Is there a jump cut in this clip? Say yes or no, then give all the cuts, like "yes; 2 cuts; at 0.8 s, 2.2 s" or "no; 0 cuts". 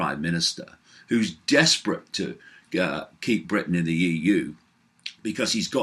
no; 0 cuts